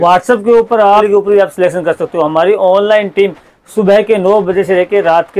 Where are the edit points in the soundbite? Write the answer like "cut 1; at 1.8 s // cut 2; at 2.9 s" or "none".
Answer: cut 1; at 1.1 s